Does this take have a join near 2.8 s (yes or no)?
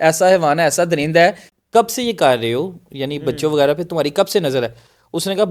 no